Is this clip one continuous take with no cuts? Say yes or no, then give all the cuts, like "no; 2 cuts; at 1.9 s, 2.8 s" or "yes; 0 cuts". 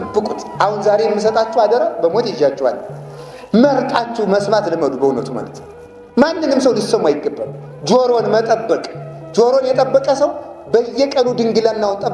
yes; 0 cuts